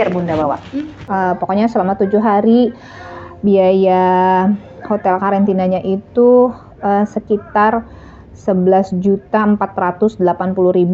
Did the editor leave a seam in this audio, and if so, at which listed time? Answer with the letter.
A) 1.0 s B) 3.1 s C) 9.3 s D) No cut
A